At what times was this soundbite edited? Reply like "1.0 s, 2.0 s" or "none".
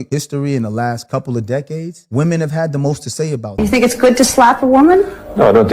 3.6 s